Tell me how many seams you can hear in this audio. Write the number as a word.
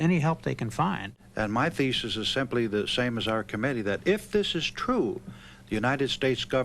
one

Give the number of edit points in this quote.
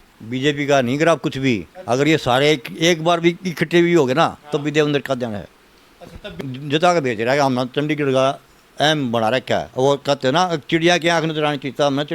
one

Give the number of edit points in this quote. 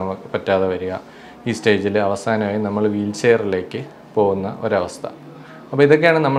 zero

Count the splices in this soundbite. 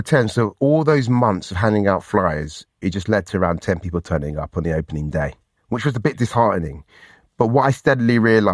one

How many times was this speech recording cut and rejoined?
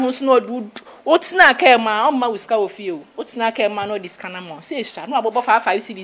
zero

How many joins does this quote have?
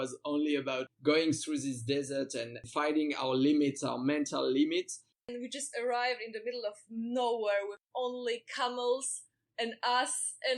one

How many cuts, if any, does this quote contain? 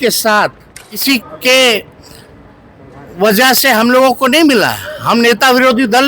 one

